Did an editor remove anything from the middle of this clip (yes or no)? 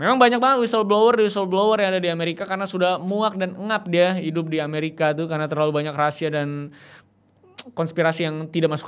no